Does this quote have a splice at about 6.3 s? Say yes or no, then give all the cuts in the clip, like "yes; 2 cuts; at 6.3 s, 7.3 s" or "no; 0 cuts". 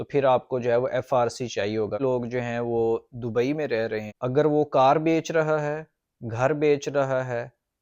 no; 2 cuts; at 2.0 s, 4.1 s